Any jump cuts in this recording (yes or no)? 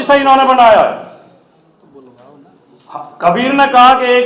no